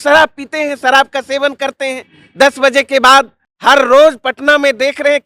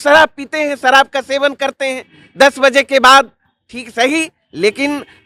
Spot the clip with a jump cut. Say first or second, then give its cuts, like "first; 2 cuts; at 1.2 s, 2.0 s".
first; 1 cut; at 3.4 s